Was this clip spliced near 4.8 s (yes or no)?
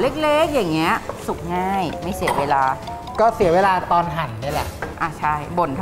yes